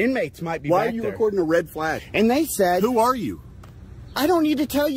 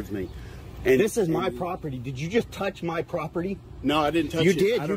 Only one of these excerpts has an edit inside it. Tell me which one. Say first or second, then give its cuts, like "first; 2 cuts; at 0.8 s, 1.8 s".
first; 1 cut; at 2.0 s